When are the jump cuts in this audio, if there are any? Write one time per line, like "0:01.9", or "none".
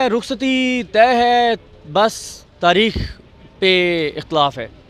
none